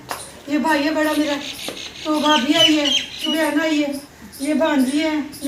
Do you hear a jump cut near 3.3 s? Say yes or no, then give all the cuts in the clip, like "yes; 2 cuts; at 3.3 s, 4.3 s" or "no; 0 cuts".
yes; 1 cut; at 3.3 s